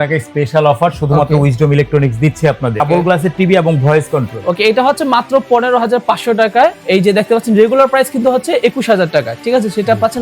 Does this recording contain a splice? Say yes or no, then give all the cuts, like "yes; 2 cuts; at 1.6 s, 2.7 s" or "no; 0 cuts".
yes; 2 cuts; at 2.8 s, 6.8 s